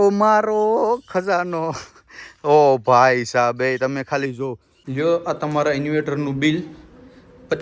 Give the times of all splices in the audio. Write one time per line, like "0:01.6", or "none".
0:04.8